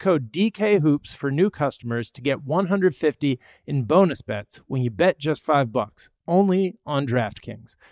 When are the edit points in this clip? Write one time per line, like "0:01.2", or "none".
none